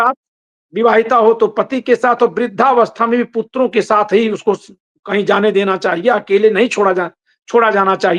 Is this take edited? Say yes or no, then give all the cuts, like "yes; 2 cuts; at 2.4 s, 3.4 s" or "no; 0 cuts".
no; 0 cuts